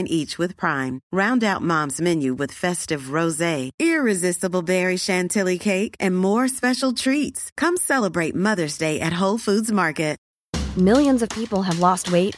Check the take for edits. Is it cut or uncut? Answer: cut